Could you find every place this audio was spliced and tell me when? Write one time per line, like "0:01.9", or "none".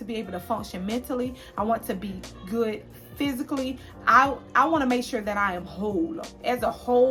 none